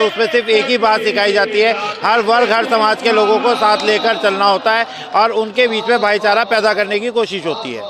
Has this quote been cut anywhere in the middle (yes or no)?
no